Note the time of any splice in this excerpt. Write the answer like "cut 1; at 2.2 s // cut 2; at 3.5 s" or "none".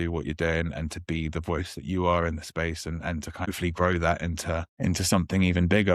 cut 1; at 3.5 s // cut 2; at 4.7 s